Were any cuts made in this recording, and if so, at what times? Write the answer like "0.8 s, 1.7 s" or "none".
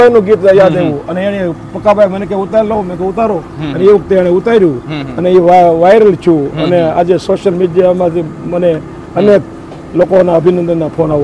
none